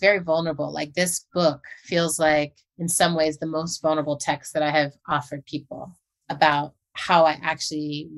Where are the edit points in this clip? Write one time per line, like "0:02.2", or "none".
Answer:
none